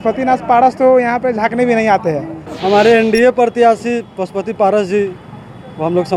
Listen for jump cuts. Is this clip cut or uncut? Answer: cut